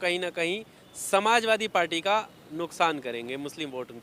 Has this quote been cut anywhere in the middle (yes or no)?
no